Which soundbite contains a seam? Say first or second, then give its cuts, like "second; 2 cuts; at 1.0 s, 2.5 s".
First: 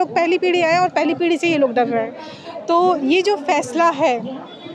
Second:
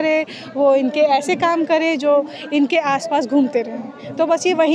first; 1 cut; at 2.0 s